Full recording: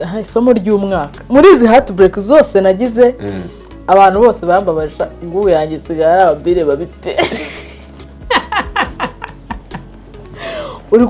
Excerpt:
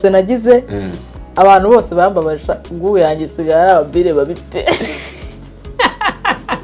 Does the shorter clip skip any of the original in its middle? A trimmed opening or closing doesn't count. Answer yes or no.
no